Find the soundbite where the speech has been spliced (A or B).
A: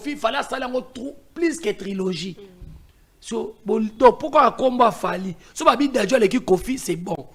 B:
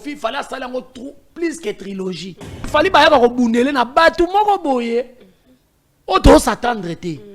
B